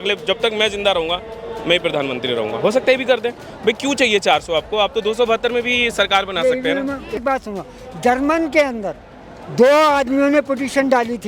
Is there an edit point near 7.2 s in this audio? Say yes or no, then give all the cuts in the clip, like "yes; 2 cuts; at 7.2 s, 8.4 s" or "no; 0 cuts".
yes; 1 cut; at 7.2 s